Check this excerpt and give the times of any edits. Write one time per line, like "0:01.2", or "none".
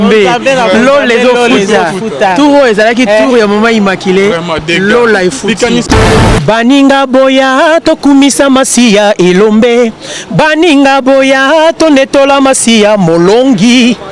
0:05.9